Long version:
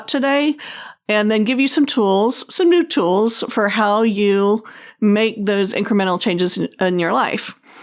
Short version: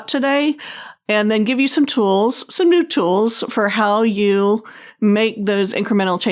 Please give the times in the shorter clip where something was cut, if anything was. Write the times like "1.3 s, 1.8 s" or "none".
none